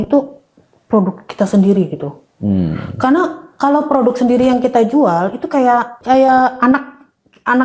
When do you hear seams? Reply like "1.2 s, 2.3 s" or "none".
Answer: none